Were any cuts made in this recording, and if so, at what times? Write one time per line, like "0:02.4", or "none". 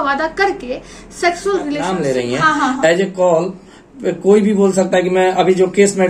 0:01.9